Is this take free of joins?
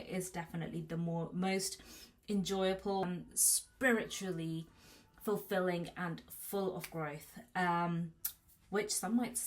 no; 1 cut; at 3.0 s

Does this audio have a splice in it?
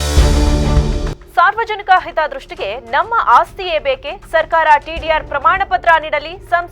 yes; 1 cut; at 1.0 s

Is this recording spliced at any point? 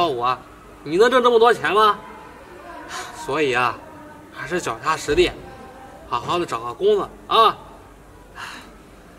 no; 0 cuts

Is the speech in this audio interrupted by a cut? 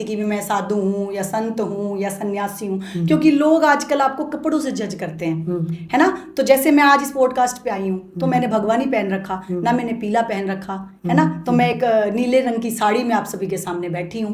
no; 0 cuts

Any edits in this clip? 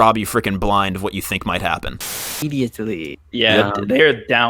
yes; 1 cut; at 2.3 s

